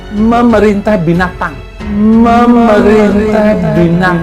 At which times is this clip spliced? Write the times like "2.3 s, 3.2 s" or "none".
1.2 s

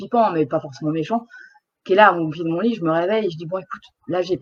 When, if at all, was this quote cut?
none

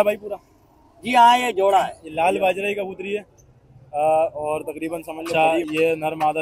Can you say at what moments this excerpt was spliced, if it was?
2.0 s, 5.2 s

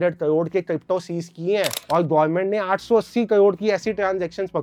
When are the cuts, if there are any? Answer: none

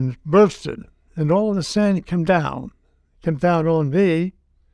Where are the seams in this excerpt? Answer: none

